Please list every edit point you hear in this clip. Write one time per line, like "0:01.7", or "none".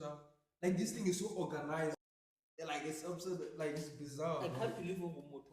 0:01.9